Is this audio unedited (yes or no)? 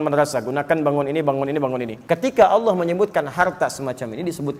no